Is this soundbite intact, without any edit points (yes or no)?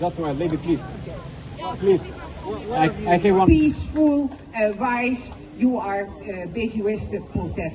no